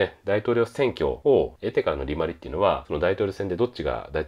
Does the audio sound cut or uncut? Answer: cut